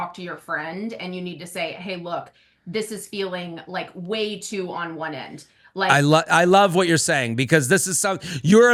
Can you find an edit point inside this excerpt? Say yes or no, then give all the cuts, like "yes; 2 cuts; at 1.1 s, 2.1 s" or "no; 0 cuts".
no; 0 cuts